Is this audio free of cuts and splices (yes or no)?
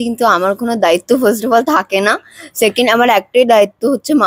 yes